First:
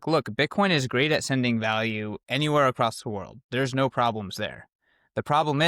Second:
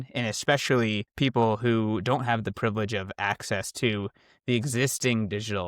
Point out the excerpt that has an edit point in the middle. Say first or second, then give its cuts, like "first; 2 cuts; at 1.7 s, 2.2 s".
second; 1 cut; at 1.1 s